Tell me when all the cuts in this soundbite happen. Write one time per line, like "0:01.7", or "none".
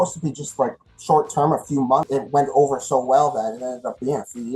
0:02.1